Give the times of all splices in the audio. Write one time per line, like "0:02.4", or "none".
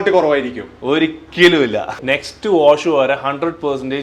0:02.0